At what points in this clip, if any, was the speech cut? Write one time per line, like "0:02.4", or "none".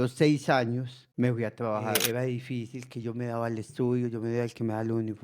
0:01.0
0:02.0